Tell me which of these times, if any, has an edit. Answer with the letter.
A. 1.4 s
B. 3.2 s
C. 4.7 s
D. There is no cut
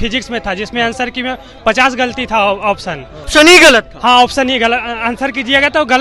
B